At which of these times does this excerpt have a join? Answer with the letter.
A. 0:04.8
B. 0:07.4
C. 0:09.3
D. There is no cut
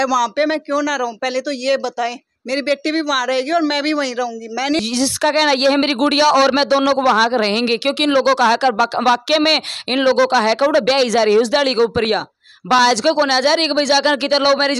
A